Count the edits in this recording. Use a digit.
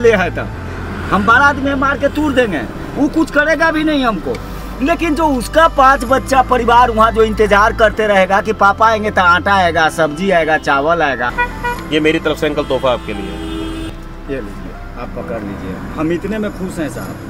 2